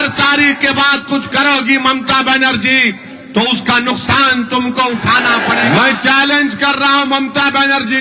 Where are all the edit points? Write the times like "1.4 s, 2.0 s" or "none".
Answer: 5.4 s